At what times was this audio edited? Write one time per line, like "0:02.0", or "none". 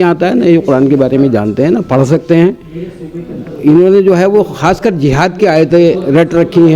none